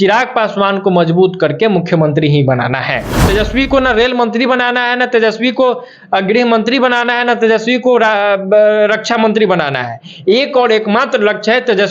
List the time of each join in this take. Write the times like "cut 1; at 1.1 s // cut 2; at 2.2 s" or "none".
cut 1; at 3.2 s